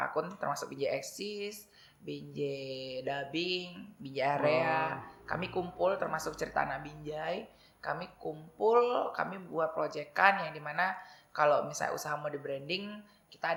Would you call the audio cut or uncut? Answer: uncut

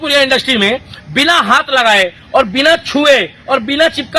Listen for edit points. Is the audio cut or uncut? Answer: uncut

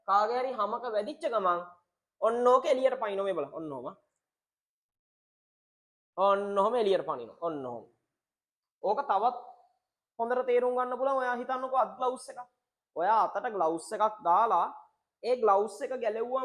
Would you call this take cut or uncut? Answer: uncut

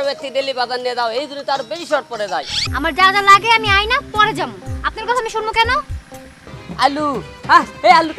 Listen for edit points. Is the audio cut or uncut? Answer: cut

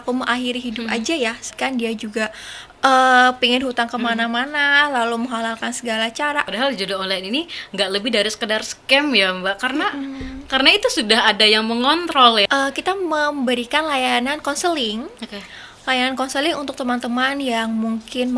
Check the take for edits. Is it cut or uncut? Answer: cut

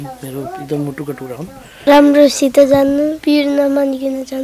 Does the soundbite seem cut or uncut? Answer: cut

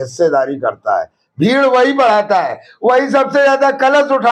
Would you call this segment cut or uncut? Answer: uncut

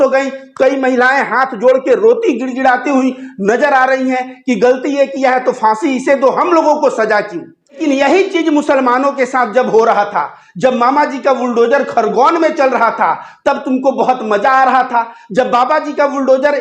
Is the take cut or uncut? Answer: cut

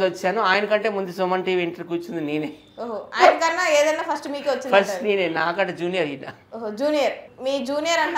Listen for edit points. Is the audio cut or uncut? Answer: uncut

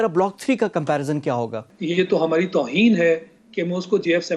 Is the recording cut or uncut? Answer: cut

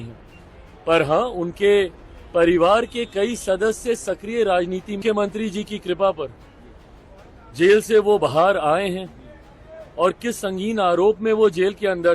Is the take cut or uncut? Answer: cut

